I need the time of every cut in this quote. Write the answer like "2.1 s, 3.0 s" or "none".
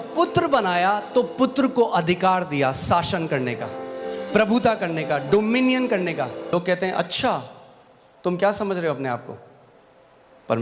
6.5 s